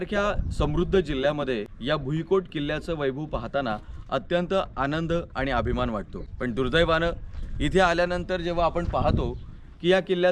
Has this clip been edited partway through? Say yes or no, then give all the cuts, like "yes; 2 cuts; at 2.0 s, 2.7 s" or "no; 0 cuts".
yes; 2 cuts; at 1.7 s, 6.2 s